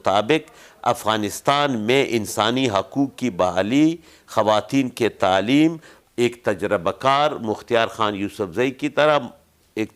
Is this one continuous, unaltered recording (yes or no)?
no